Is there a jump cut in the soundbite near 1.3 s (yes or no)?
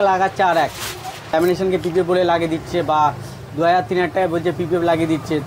yes